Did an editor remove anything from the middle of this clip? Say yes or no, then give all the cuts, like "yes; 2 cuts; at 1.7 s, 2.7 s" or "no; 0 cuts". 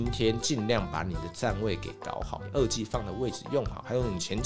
yes; 1 cut; at 2.4 s